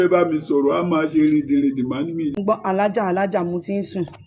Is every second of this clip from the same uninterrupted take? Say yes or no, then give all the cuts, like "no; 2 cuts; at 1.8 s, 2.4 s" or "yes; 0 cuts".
no; 1 cut; at 2.3 s